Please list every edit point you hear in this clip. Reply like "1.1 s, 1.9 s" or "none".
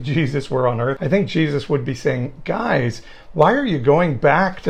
1.0 s